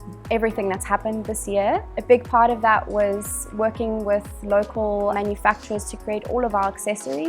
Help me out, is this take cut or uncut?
cut